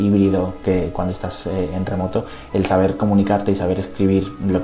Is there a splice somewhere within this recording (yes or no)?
no